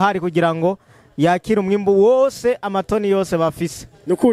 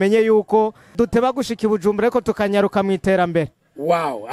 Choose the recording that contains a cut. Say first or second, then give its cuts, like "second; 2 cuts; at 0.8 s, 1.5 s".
second; 1 cut; at 0.9 s